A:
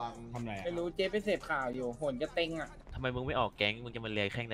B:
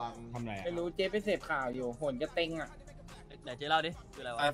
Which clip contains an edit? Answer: A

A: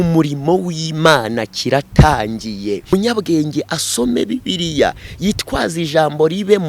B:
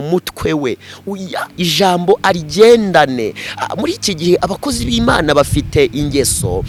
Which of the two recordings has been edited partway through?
A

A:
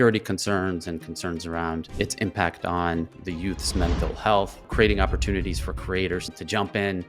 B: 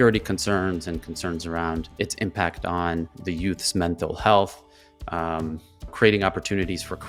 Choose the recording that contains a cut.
A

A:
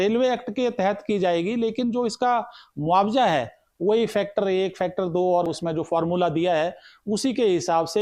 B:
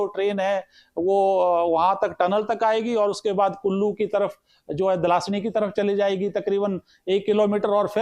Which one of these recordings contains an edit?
A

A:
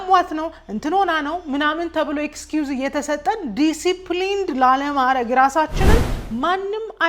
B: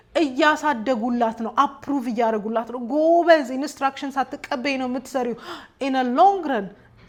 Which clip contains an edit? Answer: A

